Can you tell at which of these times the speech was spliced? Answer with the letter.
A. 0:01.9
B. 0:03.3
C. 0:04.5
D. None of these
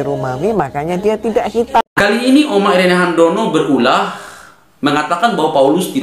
A